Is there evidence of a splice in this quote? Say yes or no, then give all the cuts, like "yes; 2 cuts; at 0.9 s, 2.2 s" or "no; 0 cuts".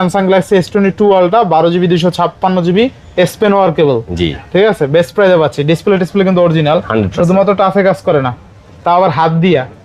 no; 0 cuts